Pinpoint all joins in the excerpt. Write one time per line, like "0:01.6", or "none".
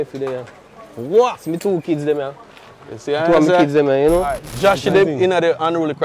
0:04.5

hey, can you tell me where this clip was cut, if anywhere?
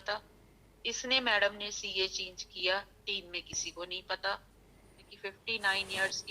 0:05.1

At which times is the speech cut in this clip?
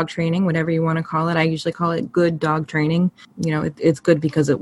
0:03.2

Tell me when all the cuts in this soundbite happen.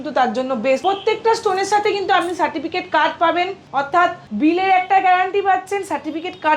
0:00.8
0:04.0

